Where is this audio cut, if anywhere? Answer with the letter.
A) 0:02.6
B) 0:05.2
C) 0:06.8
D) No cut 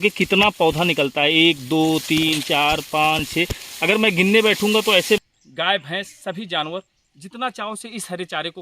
B